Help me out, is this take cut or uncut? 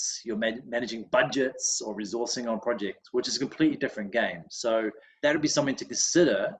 cut